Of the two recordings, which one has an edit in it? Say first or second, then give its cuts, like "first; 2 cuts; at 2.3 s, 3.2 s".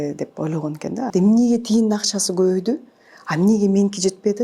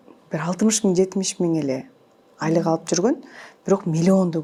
first; 1 cut; at 1.1 s